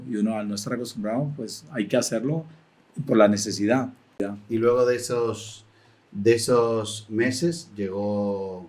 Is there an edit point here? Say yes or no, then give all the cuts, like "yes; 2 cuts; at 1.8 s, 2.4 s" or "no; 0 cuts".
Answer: yes; 1 cut; at 4.2 s